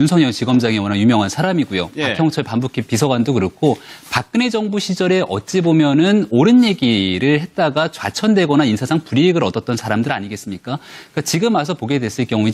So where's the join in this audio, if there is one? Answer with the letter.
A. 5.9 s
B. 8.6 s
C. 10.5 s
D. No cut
D